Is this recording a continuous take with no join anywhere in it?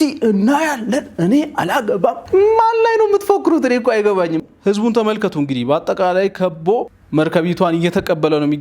no; 2 cuts; at 4.4 s, 7.0 s

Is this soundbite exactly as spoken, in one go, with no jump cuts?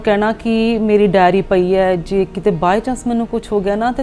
yes; 0 cuts

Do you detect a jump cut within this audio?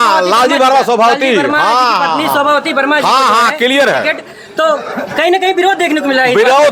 no; 0 cuts

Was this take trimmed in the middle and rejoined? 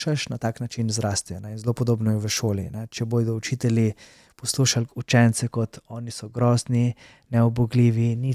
no; 0 cuts

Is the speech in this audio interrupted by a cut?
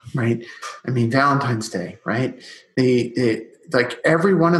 no; 0 cuts

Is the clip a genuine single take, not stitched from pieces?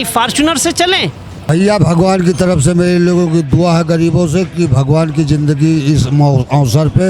no; 1 cut; at 1.4 s

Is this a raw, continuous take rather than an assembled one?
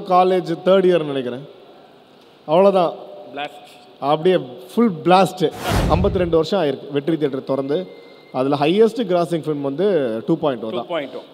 no; 1 cut; at 5.7 s

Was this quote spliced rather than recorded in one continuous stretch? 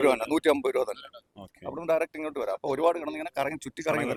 no; 0 cuts

